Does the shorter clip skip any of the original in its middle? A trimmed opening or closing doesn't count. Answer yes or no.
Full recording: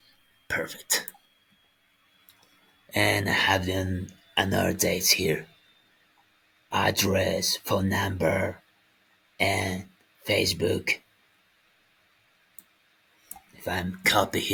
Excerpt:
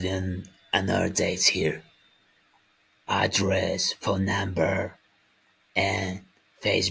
no